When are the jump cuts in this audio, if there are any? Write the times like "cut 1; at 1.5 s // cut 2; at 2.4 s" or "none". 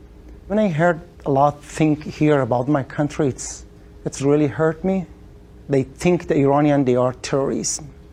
none